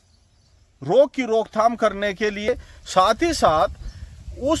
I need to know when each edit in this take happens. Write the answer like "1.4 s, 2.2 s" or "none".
2.5 s